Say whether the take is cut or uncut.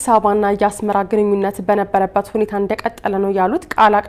uncut